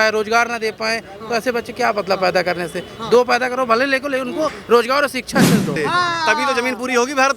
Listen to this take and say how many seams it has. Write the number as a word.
one